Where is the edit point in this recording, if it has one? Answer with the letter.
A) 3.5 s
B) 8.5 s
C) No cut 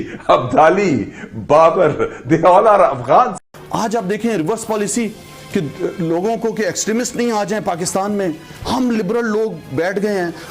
A